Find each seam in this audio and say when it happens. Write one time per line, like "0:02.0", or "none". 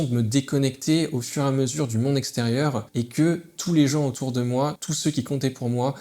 0:02.8
0:04.9